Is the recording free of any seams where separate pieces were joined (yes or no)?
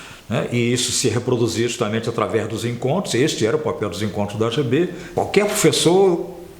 no